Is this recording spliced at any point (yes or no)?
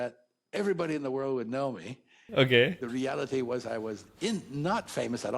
yes